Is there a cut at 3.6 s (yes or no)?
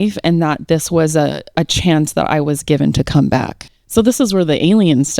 yes